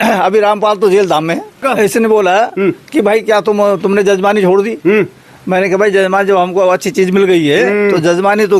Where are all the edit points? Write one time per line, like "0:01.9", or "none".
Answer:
0:01.6